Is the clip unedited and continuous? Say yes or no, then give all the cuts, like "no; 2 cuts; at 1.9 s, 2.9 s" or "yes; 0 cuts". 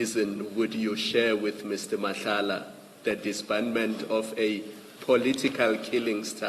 yes; 0 cuts